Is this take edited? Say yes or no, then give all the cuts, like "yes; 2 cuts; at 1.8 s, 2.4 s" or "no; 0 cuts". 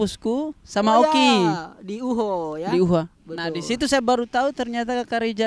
no; 0 cuts